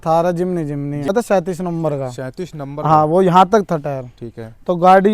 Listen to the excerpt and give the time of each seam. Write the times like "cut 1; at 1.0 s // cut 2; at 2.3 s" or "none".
cut 1; at 1.1 s